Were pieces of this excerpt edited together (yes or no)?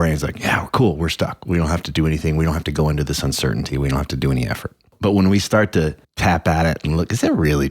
yes